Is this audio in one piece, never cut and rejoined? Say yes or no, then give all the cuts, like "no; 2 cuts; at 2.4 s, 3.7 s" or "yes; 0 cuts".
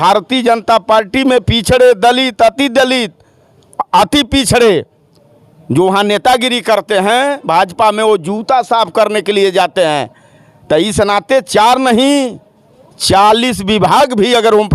yes; 0 cuts